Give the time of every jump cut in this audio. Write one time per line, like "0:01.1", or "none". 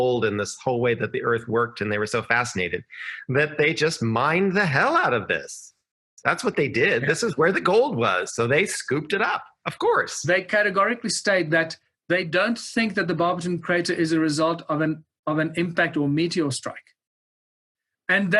0:10.2